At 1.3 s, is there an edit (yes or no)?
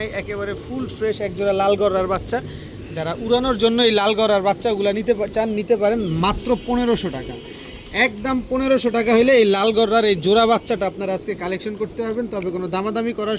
no